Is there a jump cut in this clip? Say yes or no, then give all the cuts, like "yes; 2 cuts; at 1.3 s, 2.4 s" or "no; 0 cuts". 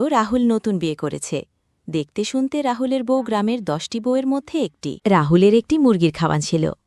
no; 0 cuts